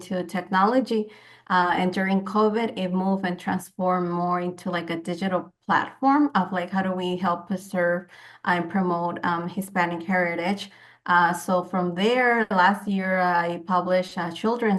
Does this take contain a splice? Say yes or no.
no